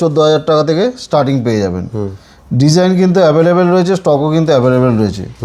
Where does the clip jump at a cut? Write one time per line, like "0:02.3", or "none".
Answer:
none